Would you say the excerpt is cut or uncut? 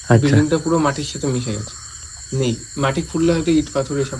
uncut